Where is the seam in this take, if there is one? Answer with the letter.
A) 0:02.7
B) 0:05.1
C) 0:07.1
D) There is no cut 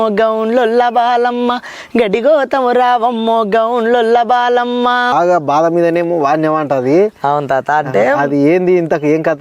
B